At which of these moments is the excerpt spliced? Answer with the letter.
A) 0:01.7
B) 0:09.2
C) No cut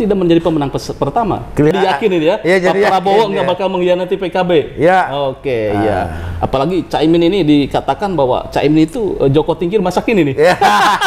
A